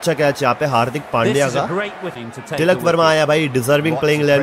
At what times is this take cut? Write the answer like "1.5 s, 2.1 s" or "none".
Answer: none